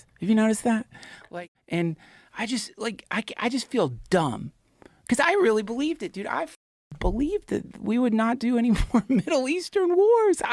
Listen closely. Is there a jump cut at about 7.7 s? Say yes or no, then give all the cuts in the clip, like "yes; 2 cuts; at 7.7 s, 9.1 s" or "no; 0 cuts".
no; 1 cut; at 1.2 s